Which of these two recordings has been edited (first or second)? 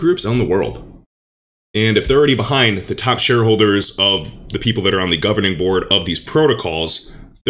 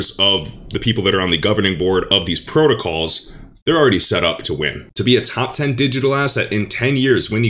second